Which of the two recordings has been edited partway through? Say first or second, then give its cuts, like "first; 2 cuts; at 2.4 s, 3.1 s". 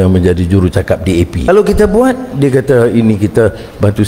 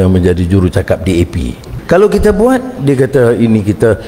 first; 1 cut; at 1.5 s